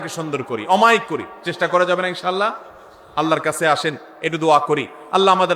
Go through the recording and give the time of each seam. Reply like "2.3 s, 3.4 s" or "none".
none